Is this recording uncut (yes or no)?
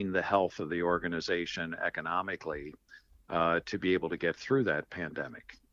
yes